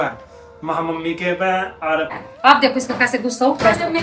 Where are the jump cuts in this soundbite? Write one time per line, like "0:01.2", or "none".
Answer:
0:02.2

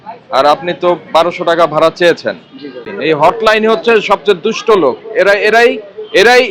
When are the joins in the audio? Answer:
0:02.9

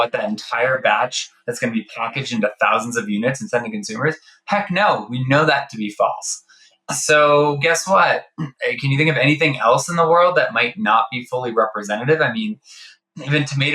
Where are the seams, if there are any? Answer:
none

